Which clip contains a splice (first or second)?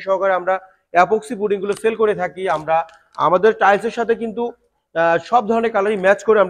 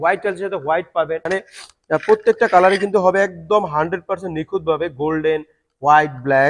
second